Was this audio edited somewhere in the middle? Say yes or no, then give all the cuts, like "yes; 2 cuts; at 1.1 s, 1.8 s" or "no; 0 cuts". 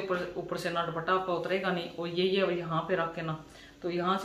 no; 0 cuts